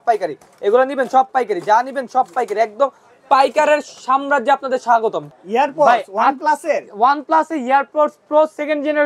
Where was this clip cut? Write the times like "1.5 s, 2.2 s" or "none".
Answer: 5.3 s